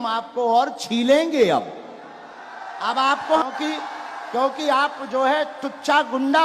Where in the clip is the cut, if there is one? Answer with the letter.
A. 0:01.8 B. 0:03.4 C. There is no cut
B